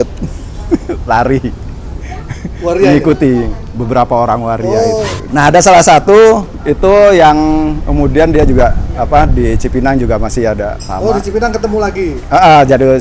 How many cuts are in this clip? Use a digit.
1